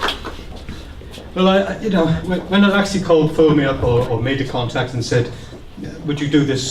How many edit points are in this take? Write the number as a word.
one